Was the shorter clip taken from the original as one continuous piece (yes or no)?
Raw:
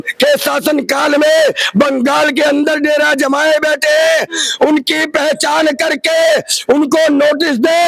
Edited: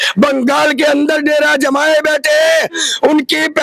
yes